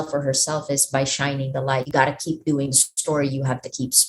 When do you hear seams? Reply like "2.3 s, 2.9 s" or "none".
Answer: 1.9 s